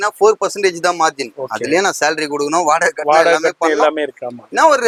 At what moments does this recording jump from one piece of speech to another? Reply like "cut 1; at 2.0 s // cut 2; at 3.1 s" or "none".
none